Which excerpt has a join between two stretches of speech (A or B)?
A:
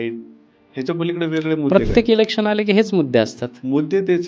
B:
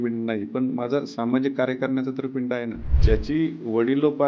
B